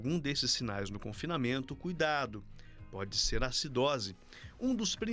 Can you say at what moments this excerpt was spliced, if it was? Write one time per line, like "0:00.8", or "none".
0:04.2

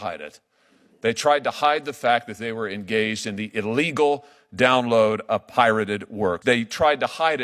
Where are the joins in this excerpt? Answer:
0:06.4

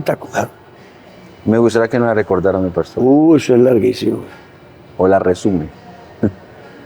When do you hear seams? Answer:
none

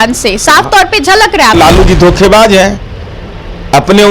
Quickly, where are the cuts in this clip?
0:01.6

